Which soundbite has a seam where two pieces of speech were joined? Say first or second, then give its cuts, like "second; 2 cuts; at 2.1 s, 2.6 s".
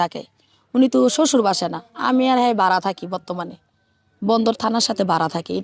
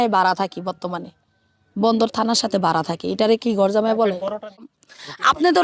second; 1 cut; at 4.7 s